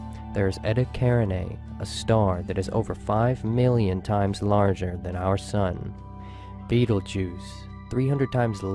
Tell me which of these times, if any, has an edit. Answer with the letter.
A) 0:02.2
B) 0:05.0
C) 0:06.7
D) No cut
B